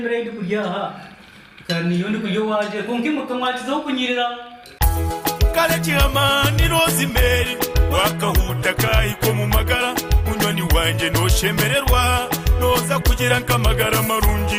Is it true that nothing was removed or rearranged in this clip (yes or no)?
yes